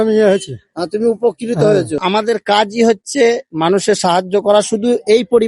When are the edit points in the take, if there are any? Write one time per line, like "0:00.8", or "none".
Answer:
0:02.0